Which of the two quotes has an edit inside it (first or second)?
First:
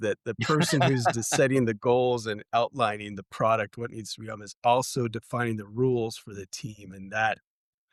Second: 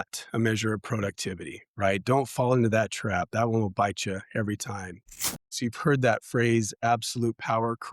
second